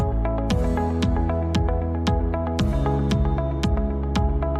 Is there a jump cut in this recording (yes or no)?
no